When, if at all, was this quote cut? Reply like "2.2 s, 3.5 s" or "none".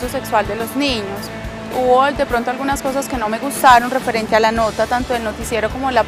none